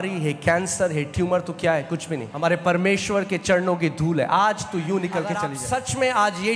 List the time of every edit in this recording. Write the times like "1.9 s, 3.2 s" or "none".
2.3 s, 5.5 s